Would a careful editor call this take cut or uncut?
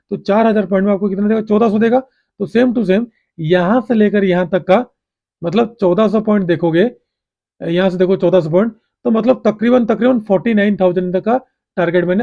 uncut